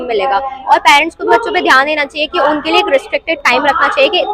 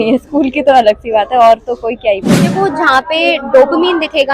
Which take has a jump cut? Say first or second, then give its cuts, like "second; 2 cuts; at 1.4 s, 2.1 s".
second; 1 cut; at 2.4 s